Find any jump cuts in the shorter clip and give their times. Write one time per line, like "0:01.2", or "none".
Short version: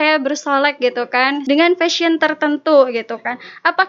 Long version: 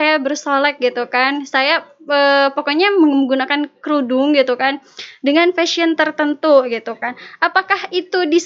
0:01.4